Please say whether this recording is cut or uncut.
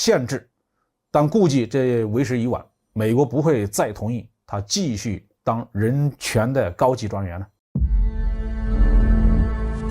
cut